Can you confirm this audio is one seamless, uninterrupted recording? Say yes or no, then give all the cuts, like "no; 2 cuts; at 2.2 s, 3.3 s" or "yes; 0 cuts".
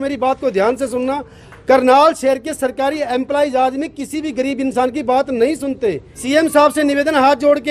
no; 1 cut; at 6.1 s